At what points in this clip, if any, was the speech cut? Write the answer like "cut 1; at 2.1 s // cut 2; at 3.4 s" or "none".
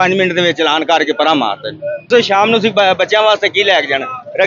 cut 1; at 2.1 s